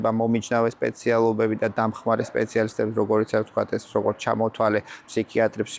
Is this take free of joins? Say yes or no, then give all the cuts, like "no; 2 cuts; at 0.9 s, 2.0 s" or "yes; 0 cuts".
yes; 0 cuts